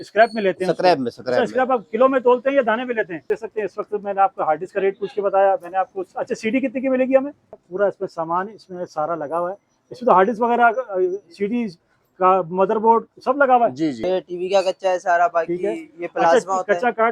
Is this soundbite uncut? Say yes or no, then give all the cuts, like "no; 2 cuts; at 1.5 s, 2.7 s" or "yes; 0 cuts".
no; 3 cuts; at 3.2 s, 7.6 s, 14.0 s